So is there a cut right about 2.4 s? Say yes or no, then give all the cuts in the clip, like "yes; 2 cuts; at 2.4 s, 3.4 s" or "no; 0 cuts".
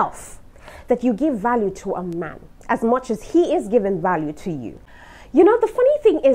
no; 1 cut; at 4.8 s